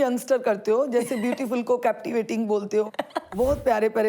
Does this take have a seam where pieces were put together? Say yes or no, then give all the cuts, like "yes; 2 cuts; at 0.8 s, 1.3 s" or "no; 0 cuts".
yes; 1 cut; at 3.0 s